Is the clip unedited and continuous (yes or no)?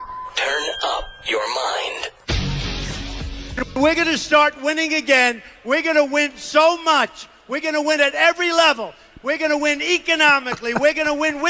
no